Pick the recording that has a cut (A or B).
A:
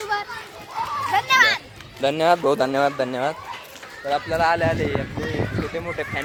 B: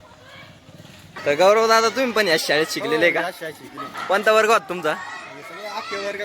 B